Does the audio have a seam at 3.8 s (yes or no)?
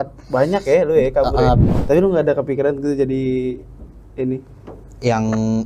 no